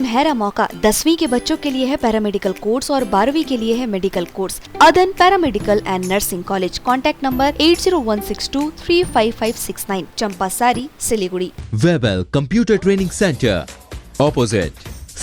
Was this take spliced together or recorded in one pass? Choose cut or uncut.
cut